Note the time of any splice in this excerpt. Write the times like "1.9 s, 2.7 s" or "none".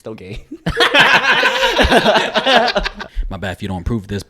3.0 s